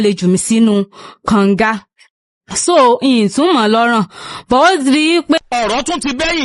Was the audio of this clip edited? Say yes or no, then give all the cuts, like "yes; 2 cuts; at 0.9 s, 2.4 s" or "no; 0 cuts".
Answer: yes; 1 cut; at 5.4 s